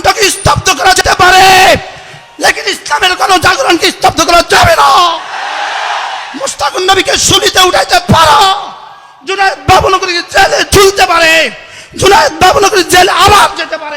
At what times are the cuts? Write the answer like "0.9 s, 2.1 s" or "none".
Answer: 1.0 s